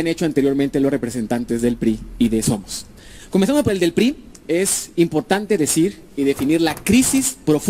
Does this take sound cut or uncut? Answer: uncut